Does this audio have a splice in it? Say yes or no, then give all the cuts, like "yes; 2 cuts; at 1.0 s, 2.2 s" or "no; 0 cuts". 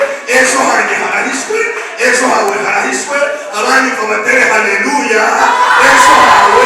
no; 0 cuts